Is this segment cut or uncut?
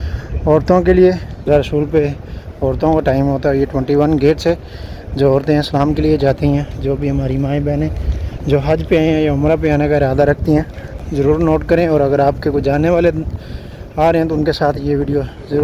cut